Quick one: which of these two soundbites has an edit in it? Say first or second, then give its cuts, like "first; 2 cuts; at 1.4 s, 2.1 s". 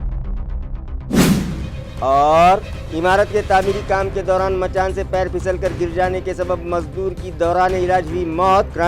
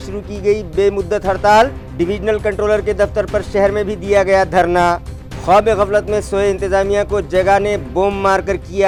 first; 2 cuts; at 1.1 s, 1.4 s